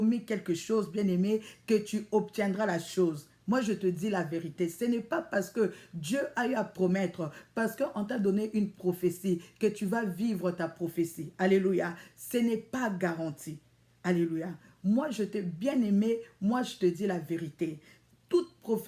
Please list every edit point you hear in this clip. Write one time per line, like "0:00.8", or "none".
none